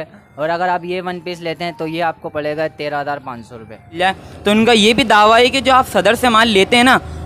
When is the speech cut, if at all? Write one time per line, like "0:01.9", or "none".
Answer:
0:04.0